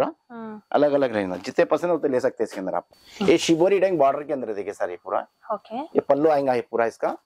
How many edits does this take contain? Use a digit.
1